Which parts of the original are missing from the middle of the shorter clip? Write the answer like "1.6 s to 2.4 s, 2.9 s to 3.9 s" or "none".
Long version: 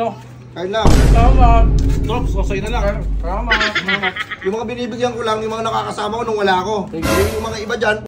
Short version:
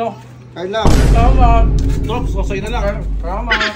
none